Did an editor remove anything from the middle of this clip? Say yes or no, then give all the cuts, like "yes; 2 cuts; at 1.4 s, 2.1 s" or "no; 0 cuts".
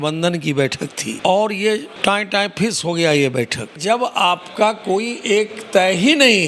yes; 3 cuts; at 1.1 s, 1.9 s, 3.8 s